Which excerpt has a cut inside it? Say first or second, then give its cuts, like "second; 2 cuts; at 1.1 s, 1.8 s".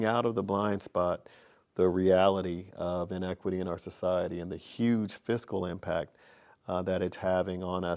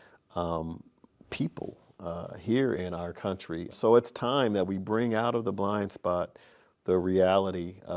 second; 1 cut; at 3.7 s